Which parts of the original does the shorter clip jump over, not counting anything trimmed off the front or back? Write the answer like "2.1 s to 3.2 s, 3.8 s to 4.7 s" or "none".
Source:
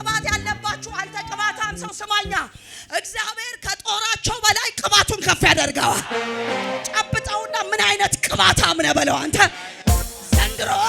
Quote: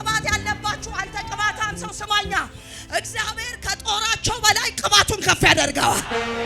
none